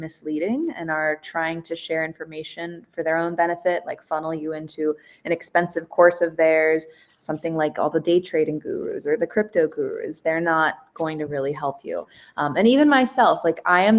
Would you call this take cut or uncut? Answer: uncut